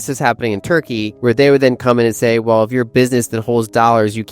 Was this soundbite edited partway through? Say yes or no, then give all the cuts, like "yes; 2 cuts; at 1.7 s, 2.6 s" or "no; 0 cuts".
yes; 1 cut; at 1.1 s